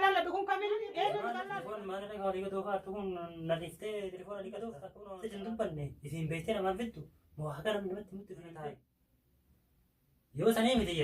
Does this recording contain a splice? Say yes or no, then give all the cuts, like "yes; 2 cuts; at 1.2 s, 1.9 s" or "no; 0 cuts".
yes; 3 cuts; at 1.7 s, 4.9 s, 8.7 s